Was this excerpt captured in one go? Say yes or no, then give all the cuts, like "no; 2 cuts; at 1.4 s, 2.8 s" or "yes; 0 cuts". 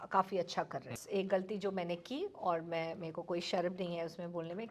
no; 1 cut; at 1.0 s